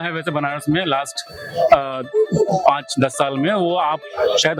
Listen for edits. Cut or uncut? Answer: uncut